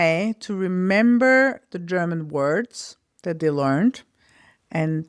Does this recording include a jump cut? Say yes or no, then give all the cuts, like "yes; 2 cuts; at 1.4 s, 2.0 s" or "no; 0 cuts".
no; 0 cuts